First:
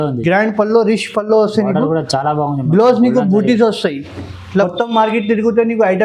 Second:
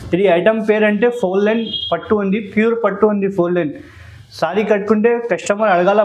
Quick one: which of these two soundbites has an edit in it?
first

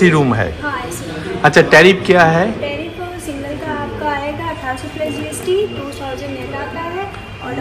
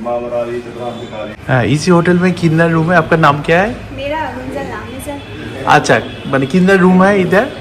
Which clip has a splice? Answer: second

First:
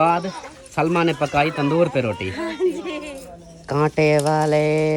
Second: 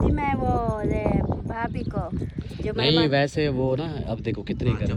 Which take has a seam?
first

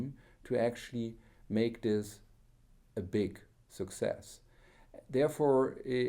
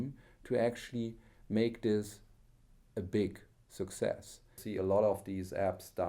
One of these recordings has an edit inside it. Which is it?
second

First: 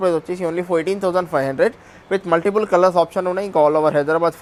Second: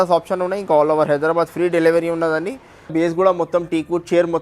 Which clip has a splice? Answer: second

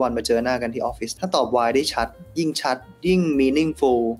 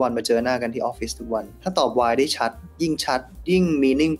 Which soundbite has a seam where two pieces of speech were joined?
first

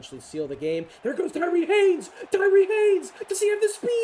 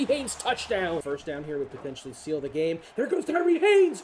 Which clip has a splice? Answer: second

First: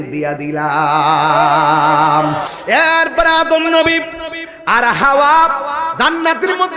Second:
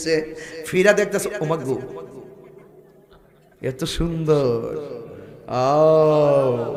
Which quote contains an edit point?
first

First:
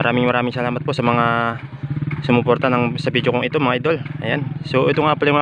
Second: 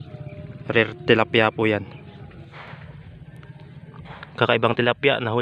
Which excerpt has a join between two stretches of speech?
second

